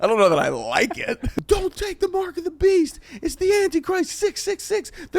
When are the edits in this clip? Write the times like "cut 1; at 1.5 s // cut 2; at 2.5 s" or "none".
cut 1; at 1.2 s